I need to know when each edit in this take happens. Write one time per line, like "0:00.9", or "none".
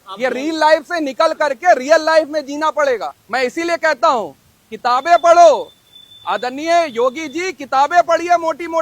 0:03.2